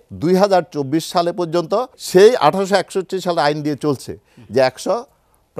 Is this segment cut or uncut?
cut